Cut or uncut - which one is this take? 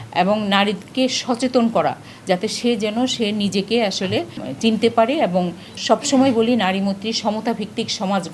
cut